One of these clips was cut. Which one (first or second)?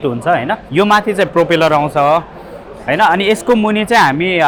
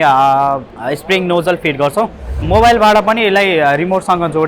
second